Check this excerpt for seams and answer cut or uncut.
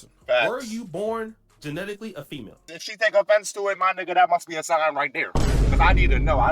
cut